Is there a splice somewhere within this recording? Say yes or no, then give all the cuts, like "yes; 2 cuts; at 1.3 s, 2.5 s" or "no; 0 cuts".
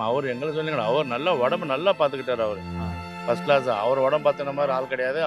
no; 0 cuts